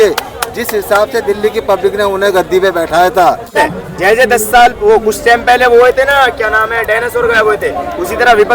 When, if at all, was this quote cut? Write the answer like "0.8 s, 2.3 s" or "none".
3.6 s